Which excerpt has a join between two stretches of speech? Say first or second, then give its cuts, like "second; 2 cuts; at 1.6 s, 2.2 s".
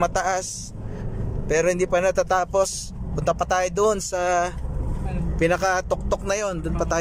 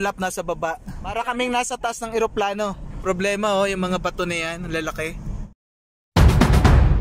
second; 3 cuts; at 1.0 s, 3.0 s, 5.8 s